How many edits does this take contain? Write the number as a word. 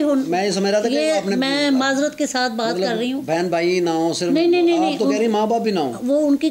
zero